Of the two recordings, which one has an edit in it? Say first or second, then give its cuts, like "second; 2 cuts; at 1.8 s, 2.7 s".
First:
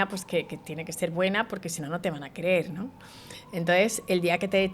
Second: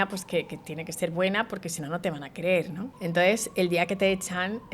second; 1 cut; at 2.9 s